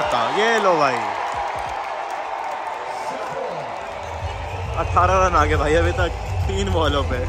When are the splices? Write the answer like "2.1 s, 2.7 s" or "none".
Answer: none